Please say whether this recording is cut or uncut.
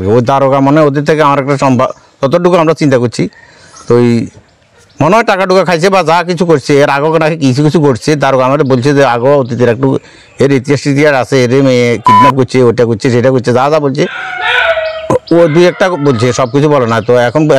uncut